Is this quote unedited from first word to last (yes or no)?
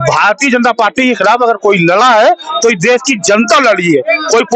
yes